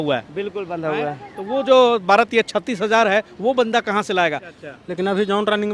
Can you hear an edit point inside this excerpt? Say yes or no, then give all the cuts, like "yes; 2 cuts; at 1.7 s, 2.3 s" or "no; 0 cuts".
yes; 1 cut; at 4.5 s